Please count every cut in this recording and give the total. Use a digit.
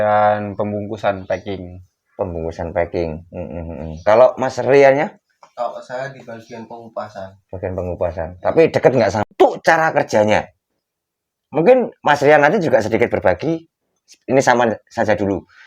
1